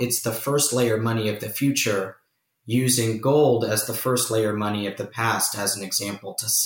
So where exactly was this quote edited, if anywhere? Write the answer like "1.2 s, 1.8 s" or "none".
none